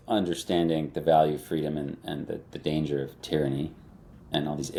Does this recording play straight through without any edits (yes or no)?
yes